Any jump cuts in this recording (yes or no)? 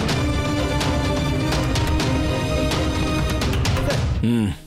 no